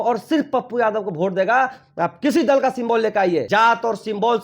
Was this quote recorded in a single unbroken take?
no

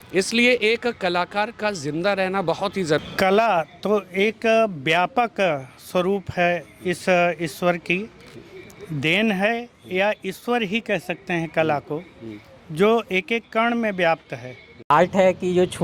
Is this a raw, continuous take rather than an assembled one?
no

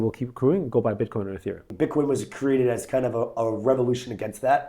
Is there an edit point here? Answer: yes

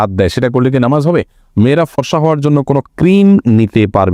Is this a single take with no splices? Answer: no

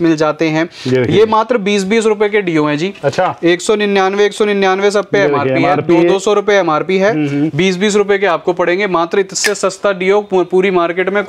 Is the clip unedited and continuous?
yes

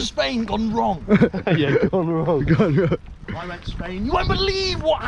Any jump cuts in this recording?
no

